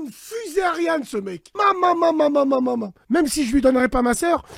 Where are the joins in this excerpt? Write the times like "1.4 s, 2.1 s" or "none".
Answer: 1.4 s, 2.9 s

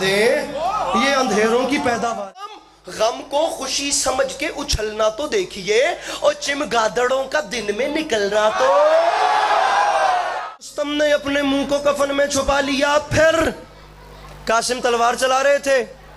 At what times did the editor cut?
2.4 s, 10.6 s

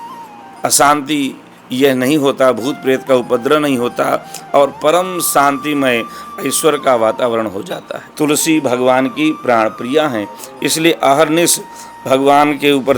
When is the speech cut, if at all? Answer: 8.0 s

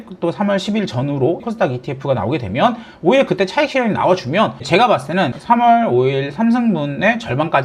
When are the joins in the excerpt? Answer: 1.4 s, 4.6 s

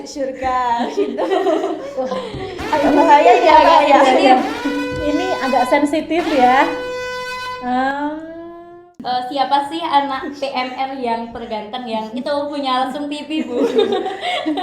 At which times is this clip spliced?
8.9 s

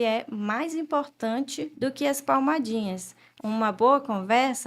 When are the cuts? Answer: 1.7 s

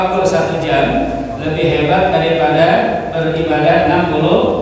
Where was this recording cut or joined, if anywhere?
none

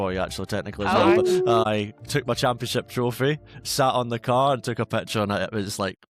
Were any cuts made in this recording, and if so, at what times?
1.6 s

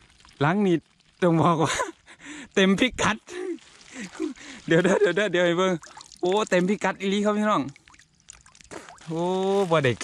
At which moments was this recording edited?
9.0 s

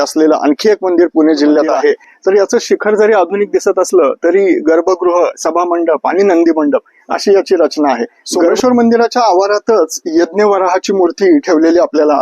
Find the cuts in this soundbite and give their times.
2.1 s, 8.5 s

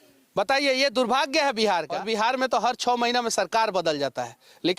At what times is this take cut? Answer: 2.0 s

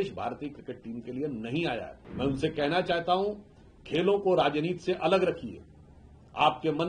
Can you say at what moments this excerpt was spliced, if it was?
2.0 s

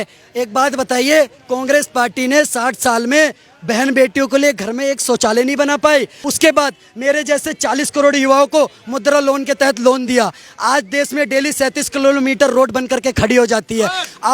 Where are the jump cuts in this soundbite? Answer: 6.2 s

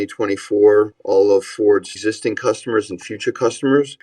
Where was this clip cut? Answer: 1.0 s, 1.9 s

